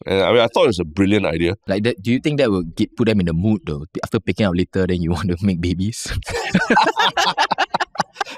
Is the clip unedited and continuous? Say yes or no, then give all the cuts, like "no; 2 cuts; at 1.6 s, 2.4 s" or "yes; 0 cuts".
no; 1 cut; at 1.6 s